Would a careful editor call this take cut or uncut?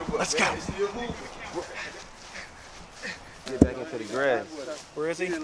cut